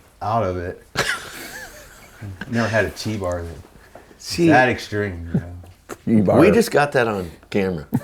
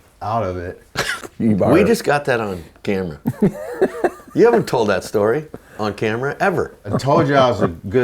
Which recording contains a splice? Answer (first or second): second